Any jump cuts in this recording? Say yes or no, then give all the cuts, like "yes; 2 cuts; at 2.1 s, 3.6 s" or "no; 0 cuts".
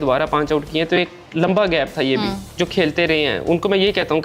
yes; 1 cut; at 2.4 s